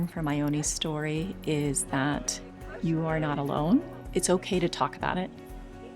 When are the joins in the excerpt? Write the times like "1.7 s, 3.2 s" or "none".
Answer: none